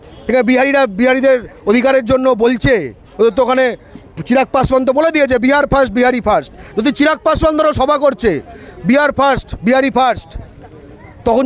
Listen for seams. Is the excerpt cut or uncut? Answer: uncut